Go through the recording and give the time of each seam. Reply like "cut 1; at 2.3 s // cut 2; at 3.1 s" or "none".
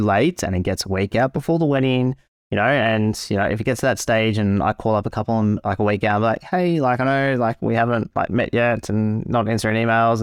none